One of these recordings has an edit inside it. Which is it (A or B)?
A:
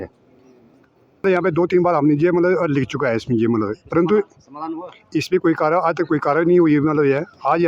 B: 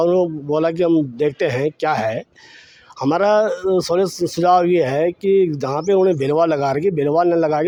A